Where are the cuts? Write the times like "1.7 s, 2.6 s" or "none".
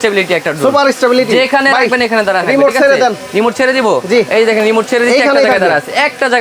none